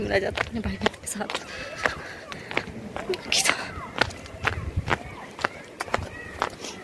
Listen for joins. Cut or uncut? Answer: cut